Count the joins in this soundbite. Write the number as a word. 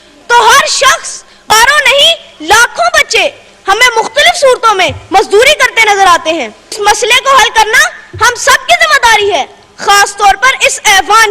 two